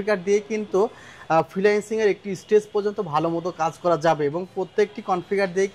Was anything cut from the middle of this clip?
no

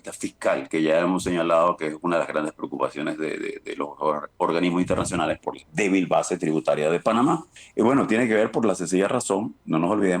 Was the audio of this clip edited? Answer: yes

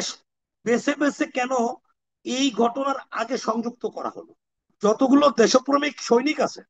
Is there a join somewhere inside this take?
yes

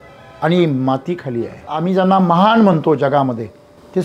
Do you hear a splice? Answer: yes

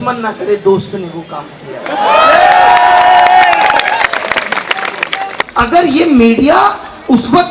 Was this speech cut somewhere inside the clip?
yes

